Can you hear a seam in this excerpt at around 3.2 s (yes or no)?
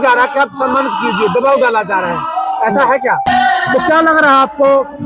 yes